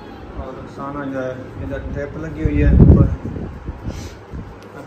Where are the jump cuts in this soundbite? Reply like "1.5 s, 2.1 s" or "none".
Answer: none

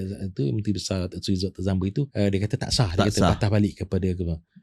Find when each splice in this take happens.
2.1 s

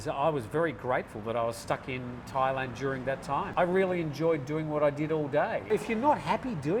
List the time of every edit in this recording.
3.5 s, 5.7 s

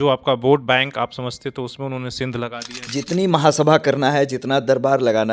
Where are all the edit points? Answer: 2.8 s

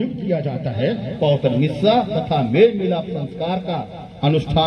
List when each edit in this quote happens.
1.1 s

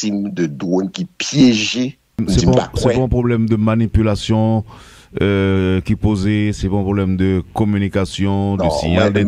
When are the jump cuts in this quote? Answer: 2.2 s

